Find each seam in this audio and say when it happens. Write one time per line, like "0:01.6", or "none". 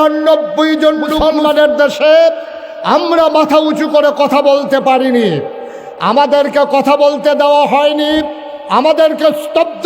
0:01.1